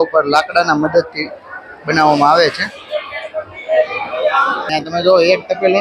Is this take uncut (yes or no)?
no